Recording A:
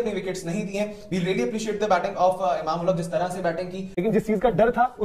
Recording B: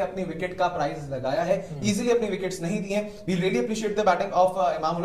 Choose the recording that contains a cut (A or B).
A